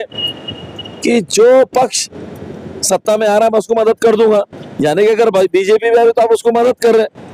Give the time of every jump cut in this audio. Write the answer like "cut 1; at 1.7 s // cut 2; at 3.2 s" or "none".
none